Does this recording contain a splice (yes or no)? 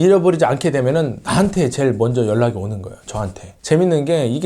yes